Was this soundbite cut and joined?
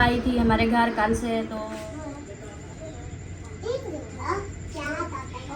yes; 1 cut; at 1.6 s

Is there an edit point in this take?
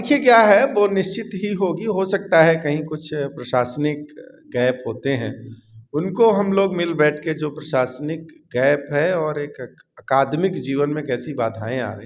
no; 0 cuts

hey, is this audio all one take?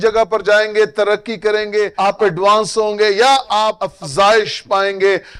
no; 2 cuts; at 1.9 s, 3.8 s

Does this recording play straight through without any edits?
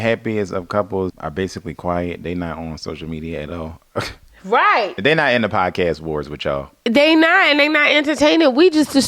no; 2 cuts; at 1.2 s, 5.0 s

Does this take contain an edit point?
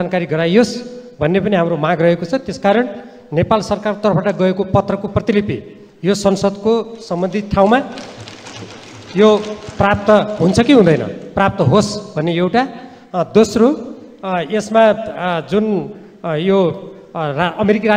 no; 0 cuts

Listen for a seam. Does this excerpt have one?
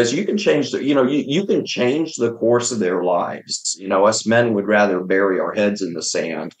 yes; 1 cut; at 3.8 s

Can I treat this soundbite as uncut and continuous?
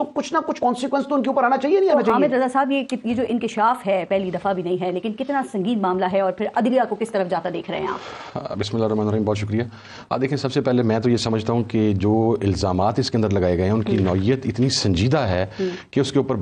yes; 0 cuts

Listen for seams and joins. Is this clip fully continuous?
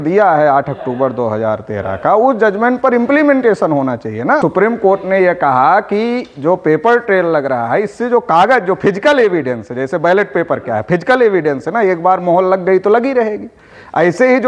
no; 1 cut; at 4.4 s

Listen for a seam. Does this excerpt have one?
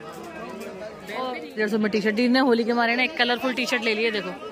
yes; 1 cut; at 1.4 s

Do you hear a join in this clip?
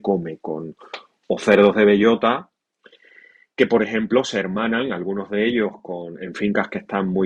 no; 0 cuts

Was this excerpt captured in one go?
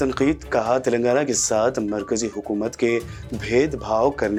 yes; 0 cuts

